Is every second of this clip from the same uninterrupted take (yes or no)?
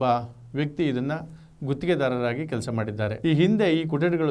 yes